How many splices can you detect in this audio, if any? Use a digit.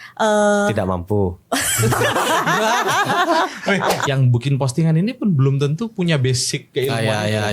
1